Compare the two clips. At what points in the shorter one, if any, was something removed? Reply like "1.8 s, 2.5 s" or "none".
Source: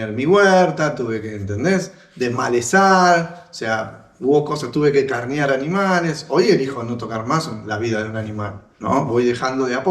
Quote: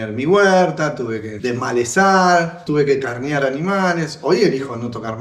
1.3 s, 2.6 s